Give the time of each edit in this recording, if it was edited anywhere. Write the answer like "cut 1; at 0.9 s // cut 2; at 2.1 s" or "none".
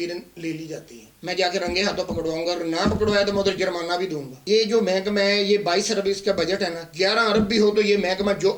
cut 1; at 1.1 s // cut 2; at 4.4 s